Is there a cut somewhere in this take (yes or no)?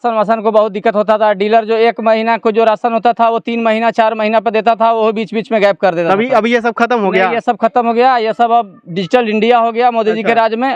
no